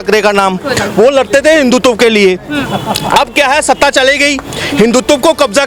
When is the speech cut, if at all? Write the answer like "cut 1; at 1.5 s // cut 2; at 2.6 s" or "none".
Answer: none

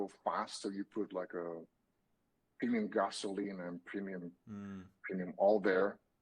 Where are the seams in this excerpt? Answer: none

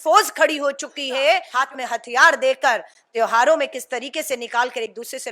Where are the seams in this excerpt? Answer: cut 1; at 1.5 s

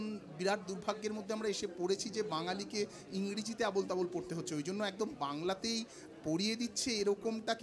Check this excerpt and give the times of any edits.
none

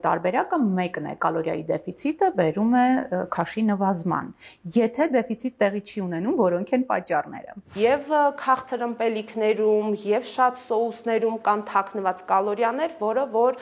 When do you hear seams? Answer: cut 1; at 7.7 s

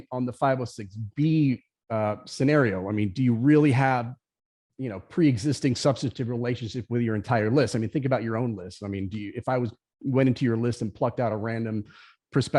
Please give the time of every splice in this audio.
none

